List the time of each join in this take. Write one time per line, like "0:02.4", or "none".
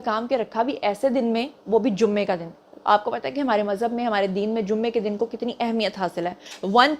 none